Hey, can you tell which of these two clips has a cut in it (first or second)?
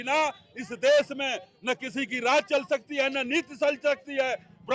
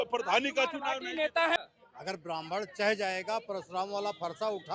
second